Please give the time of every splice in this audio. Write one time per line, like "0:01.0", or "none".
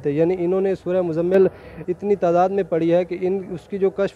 none